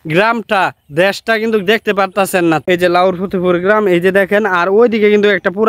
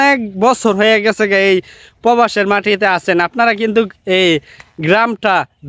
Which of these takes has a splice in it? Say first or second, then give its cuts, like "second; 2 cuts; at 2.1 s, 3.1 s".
first; 1 cut; at 2.6 s